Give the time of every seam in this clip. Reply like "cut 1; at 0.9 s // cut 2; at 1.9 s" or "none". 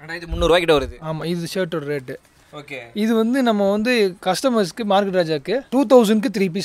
cut 1; at 4.2 s // cut 2; at 5.7 s